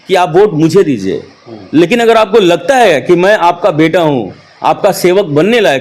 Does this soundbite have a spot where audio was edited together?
no; 0 cuts

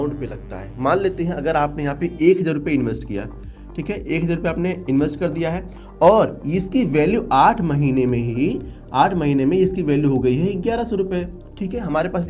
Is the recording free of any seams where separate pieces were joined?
yes; 0 cuts

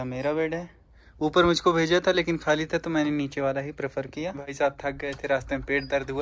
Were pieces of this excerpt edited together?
yes; 1 cut; at 4.5 s

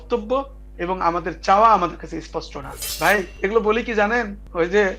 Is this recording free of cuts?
no; 1 cut; at 2.8 s

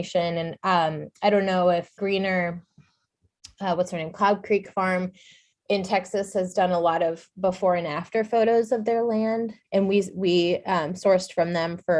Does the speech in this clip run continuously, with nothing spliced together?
no; 2 cuts; at 1.9 s, 9.6 s

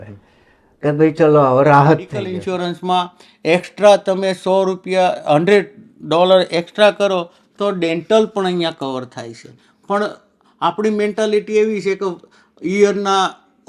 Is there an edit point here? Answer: yes; 1 cut; at 2.4 s

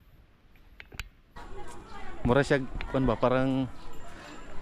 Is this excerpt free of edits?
no; 1 cut; at 1.4 s

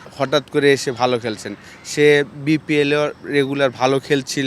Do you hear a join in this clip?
no; 0 cuts

